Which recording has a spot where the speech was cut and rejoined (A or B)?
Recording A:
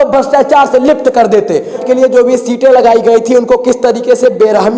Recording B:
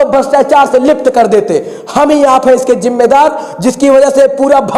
A